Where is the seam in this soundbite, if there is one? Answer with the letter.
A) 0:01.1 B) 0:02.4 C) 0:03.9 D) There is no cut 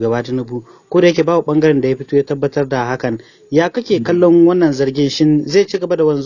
D